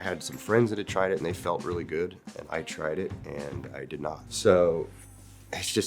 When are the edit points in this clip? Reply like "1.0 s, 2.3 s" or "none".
4.3 s